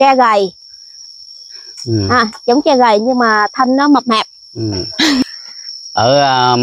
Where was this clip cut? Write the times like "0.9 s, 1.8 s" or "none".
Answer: 5.2 s